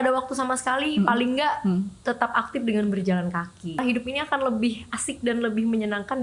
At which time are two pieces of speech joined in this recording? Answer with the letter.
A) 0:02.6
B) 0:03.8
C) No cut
B